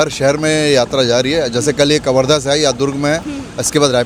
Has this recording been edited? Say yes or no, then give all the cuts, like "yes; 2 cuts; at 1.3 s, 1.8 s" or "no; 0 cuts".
no; 0 cuts